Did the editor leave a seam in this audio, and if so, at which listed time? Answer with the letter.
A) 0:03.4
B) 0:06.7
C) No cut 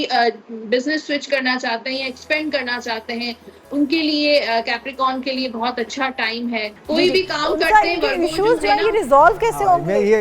B